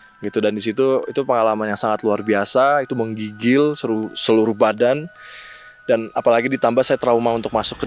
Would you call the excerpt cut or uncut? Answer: uncut